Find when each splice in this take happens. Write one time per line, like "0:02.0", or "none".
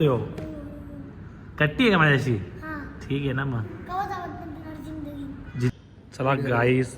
0:05.7